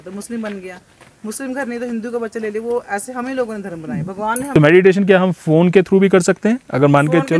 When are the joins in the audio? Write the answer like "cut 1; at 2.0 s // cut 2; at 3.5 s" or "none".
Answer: cut 1; at 4.5 s